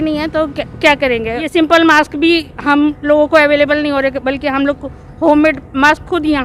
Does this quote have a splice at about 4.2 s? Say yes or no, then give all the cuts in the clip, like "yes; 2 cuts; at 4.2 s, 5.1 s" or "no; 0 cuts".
no; 1 cut; at 1.5 s